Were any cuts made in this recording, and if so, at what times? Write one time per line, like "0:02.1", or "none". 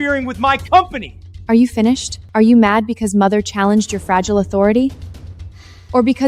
0:02.2